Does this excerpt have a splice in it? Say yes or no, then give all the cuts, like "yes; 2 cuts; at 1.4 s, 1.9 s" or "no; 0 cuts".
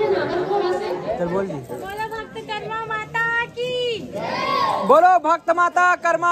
no; 0 cuts